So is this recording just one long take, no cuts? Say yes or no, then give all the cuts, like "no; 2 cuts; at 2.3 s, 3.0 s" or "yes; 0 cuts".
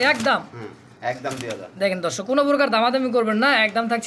yes; 0 cuts